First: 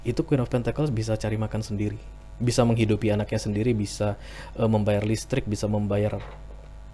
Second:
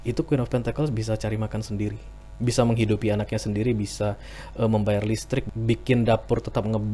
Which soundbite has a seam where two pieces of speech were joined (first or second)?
second